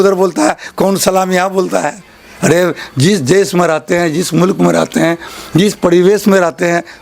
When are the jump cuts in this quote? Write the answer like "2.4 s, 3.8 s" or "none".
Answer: none